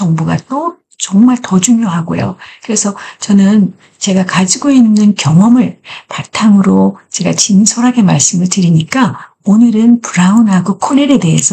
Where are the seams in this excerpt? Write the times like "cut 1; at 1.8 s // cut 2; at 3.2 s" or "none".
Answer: none